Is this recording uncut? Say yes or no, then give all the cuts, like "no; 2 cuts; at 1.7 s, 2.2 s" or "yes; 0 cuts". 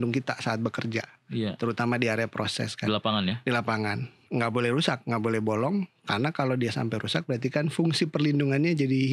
yes; 0 cuts